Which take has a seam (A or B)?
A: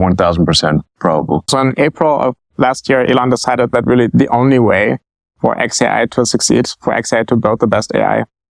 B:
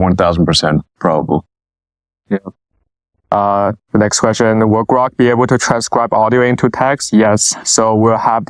A